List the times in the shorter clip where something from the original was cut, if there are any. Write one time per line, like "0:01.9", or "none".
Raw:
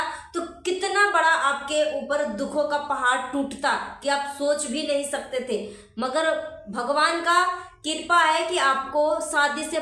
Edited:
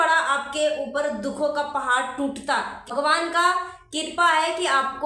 0:02.8